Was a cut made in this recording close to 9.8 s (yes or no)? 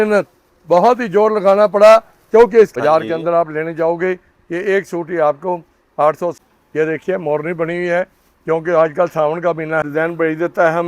yes